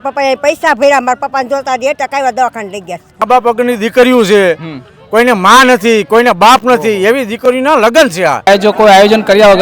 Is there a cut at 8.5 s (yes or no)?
yes